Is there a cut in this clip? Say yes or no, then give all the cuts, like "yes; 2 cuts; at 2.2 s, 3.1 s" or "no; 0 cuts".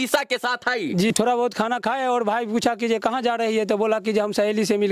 yes; 1 cut; at 1.1 s